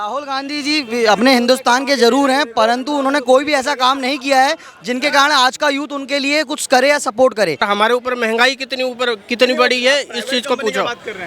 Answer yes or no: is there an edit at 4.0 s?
no